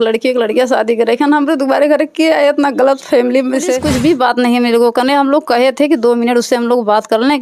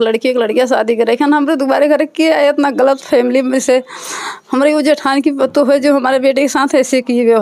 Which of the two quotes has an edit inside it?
first; 1 cut; at 3.8 s

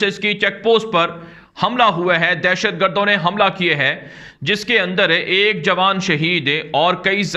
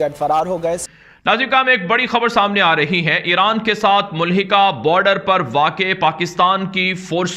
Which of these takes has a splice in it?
second; 1 cut; at 1.0 s

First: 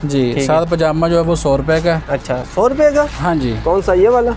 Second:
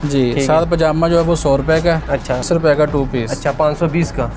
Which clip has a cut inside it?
second; 1 cut; at 2.5 s

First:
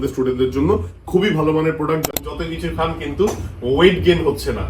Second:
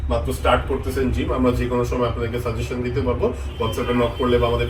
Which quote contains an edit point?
first; 1 cut; at 2.1 s

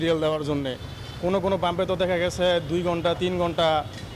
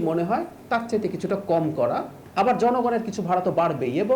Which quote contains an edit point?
second; 1 cut; at 2.2 s

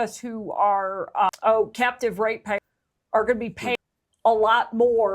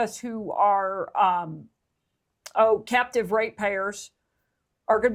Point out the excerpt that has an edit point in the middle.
first; 3 cuts; at 1.3 s, 2.6 s, 3.8 s

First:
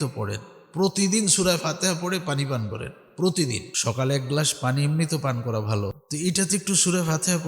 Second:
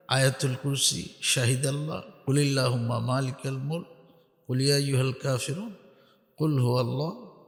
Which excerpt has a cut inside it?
first; 2 cuts; at 3.7 s, 6.0 s

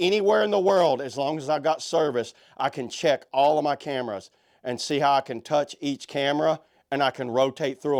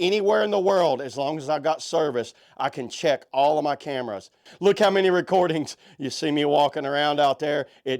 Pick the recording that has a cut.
second; 1 cut; at 4.5 s

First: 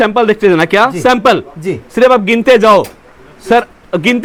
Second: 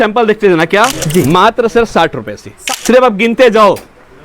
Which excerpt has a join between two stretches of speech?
second; 2 cuts; at 0.9 s, 2.5 s

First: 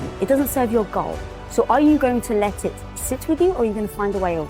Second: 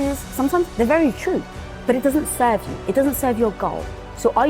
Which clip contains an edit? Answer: second; 1 cut; at 1.7 s

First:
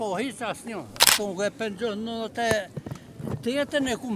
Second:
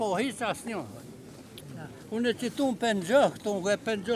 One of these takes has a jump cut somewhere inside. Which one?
first; 1 cut; at 1.1 s

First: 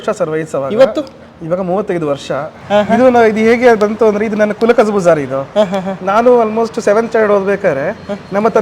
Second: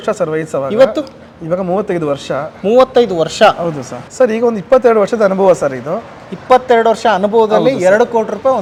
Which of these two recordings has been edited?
first; 1 cut; at 2.5 s

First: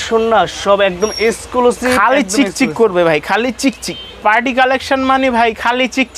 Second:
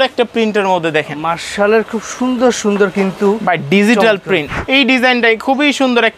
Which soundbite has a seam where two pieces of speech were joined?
second; 1 cut; at 4.5 s

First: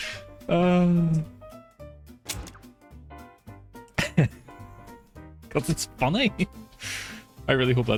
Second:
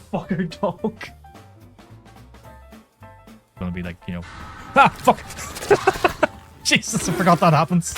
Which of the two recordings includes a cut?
second; 2 cuts; at 1.1 s, 3.2 s

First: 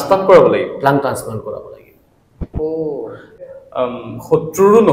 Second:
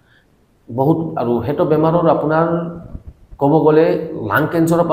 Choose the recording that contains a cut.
first; 1 cut; at 3.3 s

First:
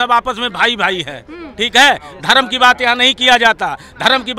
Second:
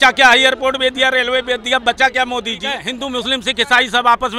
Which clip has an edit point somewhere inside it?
second; 1 cut; at 2.9 s

